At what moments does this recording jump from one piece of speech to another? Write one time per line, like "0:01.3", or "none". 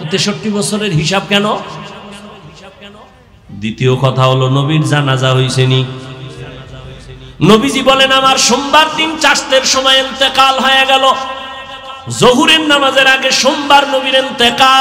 0:03.3